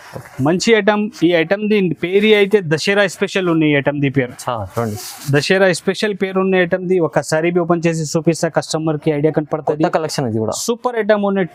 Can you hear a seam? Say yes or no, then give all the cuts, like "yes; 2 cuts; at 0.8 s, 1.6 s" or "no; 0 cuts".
no; 0 cuts